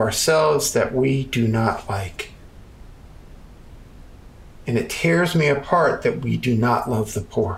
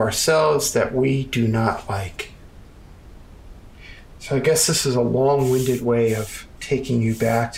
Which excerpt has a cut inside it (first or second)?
second